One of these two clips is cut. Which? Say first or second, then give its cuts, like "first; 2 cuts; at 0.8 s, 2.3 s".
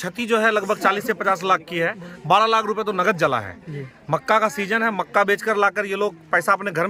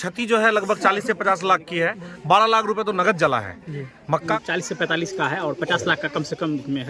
second; 1 cut; at 4.4 s